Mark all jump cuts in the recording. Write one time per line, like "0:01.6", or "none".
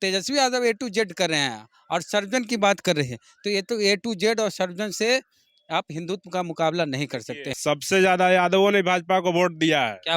0:07.5